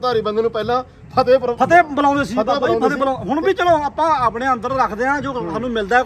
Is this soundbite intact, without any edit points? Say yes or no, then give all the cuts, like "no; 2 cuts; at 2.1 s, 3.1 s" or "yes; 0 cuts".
yes; 0 cuts